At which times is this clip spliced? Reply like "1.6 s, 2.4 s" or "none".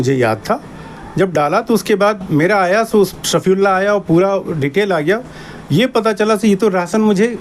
none